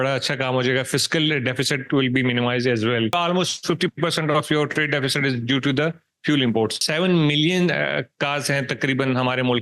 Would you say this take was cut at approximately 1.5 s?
no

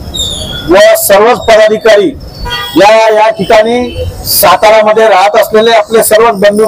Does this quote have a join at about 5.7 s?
no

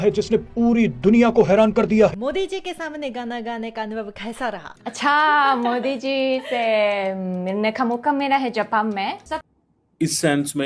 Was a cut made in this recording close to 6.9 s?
no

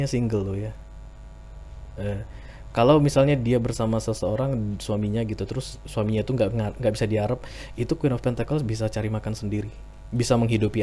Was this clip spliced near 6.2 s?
no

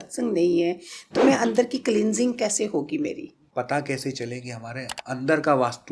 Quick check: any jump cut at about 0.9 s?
no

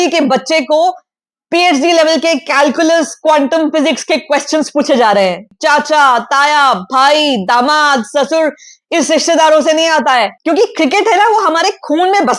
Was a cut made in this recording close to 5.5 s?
yes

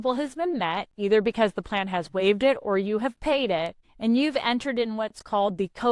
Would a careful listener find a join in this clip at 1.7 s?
no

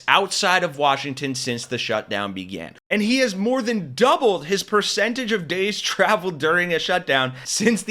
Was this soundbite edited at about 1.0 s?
no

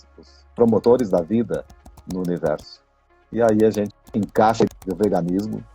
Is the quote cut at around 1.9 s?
no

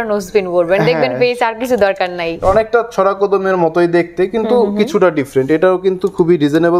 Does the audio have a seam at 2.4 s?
yes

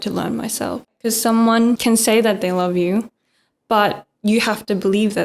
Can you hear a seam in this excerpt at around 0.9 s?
yes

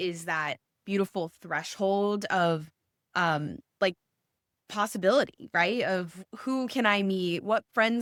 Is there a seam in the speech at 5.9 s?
no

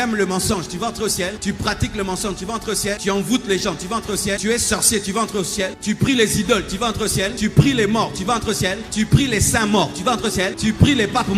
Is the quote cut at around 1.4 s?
yes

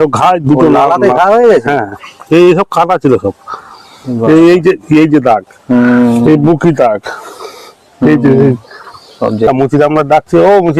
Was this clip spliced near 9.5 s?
yes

